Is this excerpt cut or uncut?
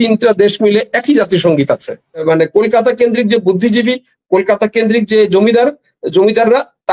cut